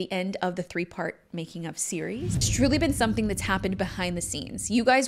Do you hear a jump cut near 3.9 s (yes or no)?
no